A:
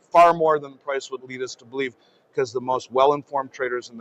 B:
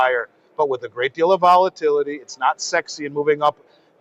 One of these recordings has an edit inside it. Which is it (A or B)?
A